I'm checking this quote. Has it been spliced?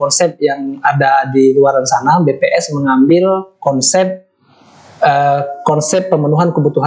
no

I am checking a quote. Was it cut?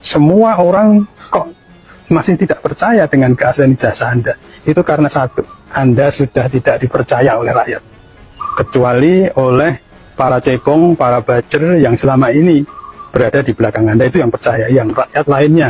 no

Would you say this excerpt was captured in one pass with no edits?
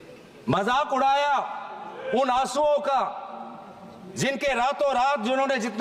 yes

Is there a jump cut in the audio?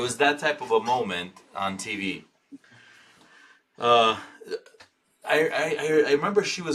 no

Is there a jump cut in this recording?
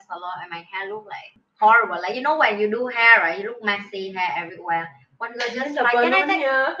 yes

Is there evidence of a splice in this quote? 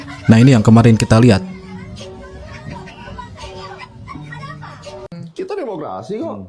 yes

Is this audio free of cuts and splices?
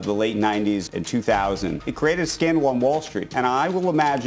no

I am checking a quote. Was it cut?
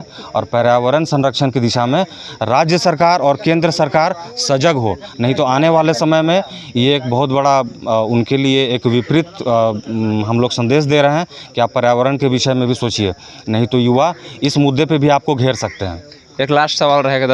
no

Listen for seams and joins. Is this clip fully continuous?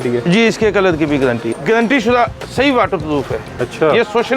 no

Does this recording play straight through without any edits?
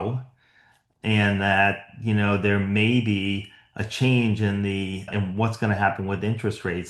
no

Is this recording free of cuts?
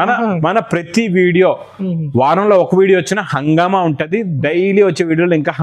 yes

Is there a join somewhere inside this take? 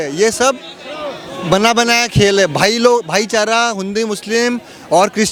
no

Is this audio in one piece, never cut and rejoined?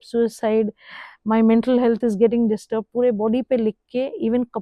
yes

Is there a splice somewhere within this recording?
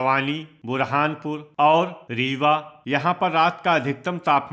yes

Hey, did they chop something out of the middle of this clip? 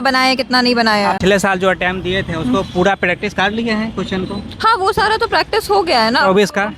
yes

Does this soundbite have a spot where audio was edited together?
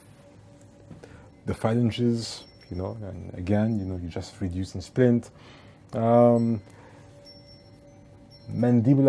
no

